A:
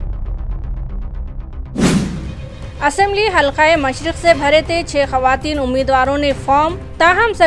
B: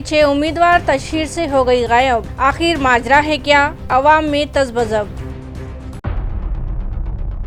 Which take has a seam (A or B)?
A